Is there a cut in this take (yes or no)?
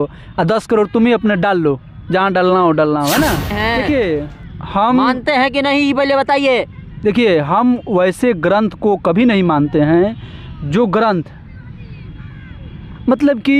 yes